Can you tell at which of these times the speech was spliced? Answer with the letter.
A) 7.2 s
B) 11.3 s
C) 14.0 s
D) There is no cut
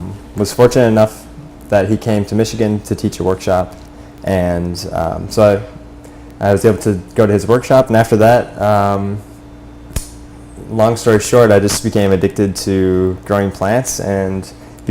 A